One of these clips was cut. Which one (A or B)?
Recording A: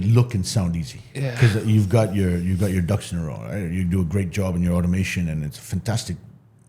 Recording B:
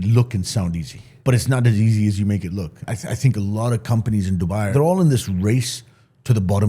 B